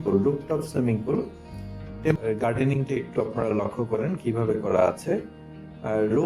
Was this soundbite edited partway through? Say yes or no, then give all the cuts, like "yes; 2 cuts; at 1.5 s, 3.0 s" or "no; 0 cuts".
yes; 1 cut; at 2.2 s